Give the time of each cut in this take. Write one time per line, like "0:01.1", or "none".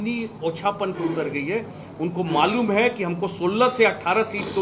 none